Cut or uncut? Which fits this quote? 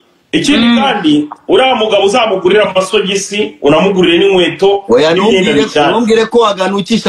uncut